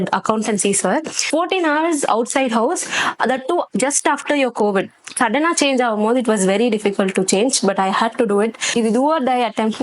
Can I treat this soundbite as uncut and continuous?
no; 3 cuts; at 1.3 s, 5.0 s, 8.7 s

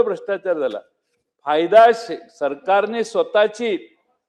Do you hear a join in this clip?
no; 0 cuts

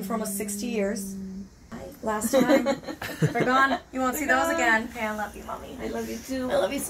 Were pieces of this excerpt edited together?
yes; 1 cut; at 4.9 s

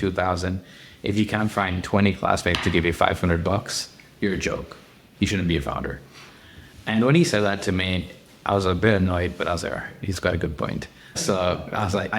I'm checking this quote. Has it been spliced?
no; 0 cuts

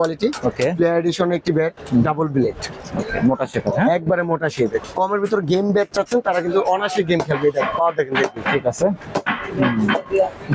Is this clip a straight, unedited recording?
no; 1 cut; at 4.8 s

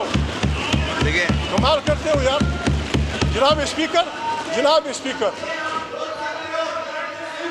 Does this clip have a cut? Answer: no; 0 cuts

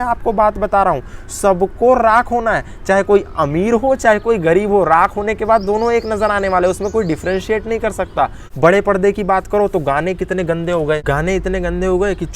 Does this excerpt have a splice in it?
yes; 2 cuts; at 8.5 s, 11.0 s

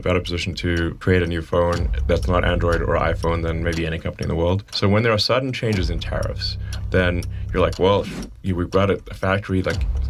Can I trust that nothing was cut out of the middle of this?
no; 2 cuts; at 1.0 s, 4.7 s

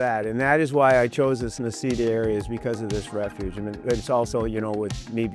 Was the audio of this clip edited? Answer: no; 0 cuts

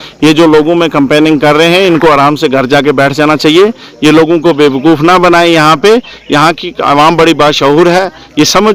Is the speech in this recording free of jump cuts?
yes; 0 cuts

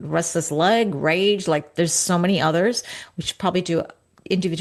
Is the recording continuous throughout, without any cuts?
yes; 0 cuts

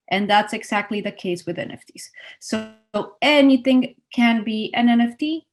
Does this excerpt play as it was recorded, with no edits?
yes; 0 cuts

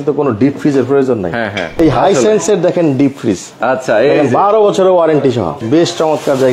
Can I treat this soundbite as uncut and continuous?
no; 2 cuts; at 1.7 s, 5.6 s

